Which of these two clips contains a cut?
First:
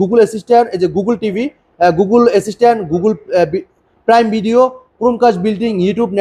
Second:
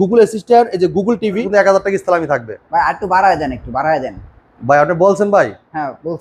second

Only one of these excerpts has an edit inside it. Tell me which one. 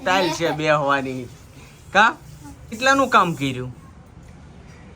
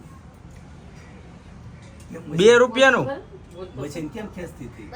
first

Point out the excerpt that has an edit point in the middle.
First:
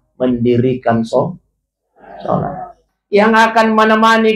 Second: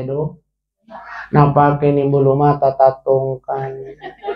first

